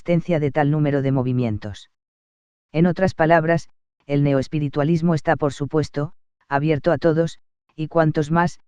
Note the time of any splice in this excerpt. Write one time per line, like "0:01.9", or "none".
0:05.6

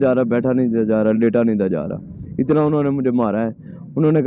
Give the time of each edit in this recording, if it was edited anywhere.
none

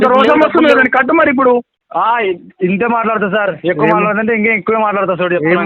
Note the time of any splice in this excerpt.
0:01.8

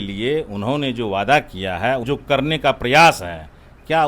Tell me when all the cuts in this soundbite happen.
0:02.0

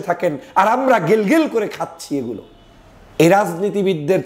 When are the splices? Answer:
none

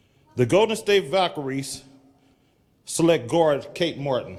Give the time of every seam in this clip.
none

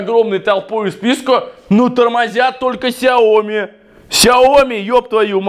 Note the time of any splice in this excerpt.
none

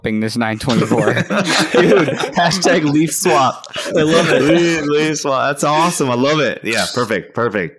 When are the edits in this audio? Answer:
none

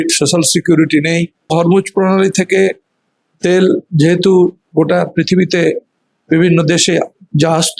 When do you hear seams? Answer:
0:01.5

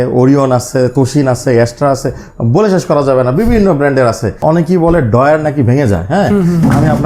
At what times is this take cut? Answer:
0:04.4

